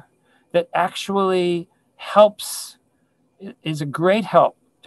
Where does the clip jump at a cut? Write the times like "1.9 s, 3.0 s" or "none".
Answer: none